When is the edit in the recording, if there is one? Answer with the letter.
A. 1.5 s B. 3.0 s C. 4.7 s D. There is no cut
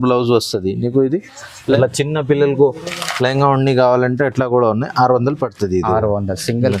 A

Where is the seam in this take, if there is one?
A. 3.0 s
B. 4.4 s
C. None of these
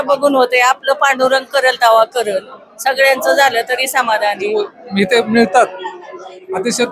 B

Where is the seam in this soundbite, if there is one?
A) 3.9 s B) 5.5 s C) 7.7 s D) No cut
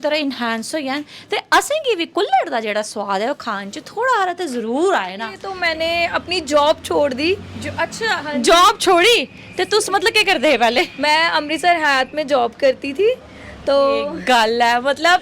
B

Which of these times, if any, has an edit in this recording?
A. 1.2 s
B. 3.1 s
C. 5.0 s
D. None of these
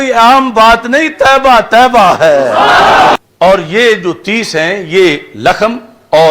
B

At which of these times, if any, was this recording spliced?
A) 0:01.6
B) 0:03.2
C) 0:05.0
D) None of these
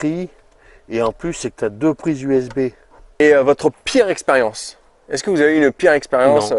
B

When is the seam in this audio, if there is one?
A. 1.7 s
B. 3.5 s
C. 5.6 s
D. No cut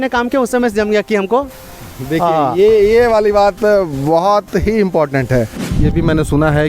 C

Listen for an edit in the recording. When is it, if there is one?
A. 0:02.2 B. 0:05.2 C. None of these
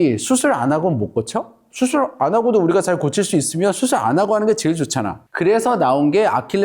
B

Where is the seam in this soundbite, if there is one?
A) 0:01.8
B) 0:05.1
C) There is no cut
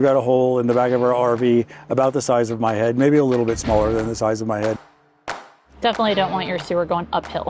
B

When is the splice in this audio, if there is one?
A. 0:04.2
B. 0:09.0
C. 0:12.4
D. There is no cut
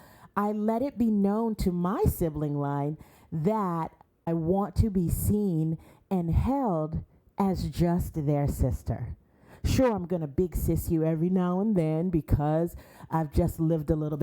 A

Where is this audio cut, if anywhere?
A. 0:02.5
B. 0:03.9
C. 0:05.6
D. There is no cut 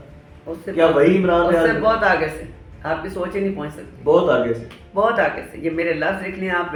D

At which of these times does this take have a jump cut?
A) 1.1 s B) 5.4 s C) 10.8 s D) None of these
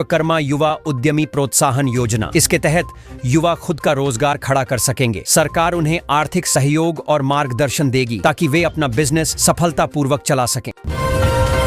C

